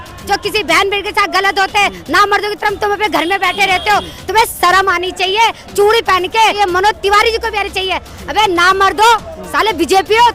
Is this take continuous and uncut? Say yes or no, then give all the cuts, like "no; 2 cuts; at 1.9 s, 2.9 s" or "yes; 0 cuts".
no; 2 cuts; at 6.5 s, 9.4 s